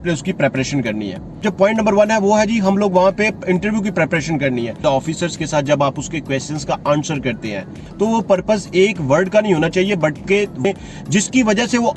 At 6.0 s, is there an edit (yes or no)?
no